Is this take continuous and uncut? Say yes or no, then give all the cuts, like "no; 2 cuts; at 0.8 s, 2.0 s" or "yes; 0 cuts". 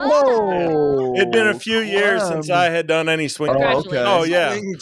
no; 1 cut; at 3.5 s